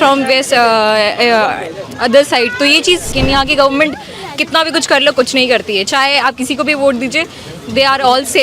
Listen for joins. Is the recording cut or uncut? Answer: cut